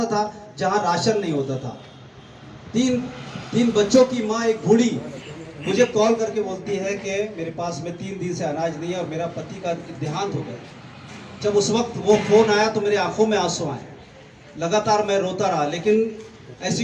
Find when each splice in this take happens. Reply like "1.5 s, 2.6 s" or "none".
none